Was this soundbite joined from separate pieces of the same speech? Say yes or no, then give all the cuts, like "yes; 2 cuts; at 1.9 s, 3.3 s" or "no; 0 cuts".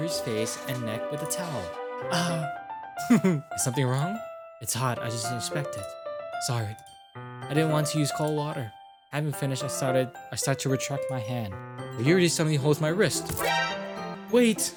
no; 0 cuts